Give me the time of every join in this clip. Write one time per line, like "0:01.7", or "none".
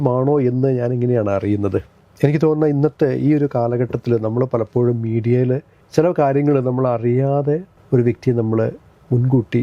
0:02.0
0:05.8
0:07.7